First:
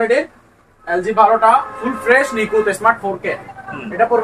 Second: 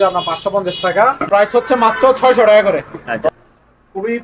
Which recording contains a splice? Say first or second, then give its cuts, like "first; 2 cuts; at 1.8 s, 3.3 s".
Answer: second; 2 cuts; at 1.5 s, 3.3 s